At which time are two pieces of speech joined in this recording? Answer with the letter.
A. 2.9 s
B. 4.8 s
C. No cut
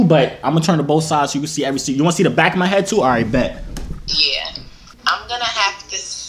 B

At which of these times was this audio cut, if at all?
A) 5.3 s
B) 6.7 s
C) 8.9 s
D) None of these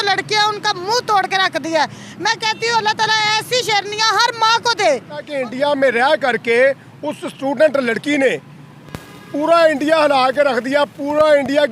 A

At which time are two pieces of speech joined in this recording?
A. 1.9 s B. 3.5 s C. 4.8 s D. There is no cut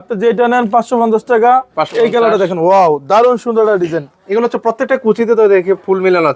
A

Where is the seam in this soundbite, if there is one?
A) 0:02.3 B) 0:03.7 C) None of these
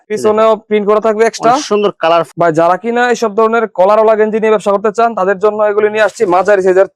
A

